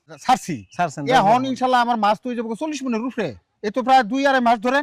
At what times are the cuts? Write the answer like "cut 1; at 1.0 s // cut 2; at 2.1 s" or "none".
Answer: cut 1; at 3.5 s